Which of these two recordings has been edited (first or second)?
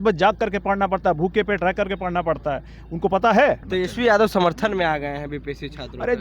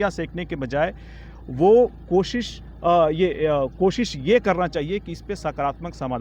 first